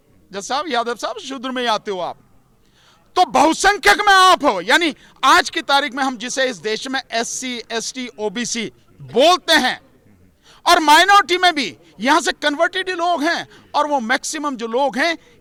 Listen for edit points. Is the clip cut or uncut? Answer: uncut